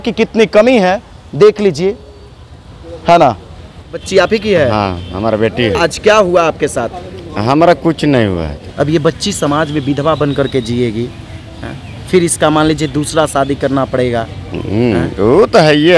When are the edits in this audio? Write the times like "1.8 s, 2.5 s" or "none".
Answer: 4.0 s, 8.6 s

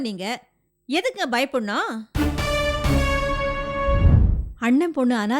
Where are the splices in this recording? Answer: 4.1 s

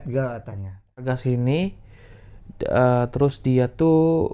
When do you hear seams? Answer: 1.1 s

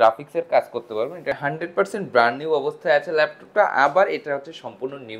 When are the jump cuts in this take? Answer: 1.4 s

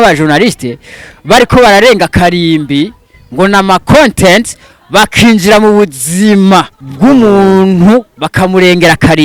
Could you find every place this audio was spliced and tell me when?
6.8 s, 8.2 s

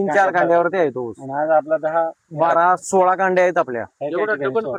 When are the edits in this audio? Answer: none

